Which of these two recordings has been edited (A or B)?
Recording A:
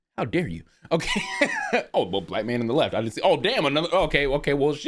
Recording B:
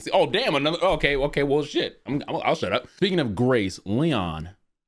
B